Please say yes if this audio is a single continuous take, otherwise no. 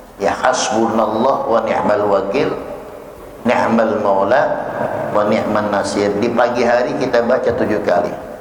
yes